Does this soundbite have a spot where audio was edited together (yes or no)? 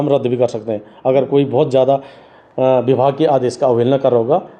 no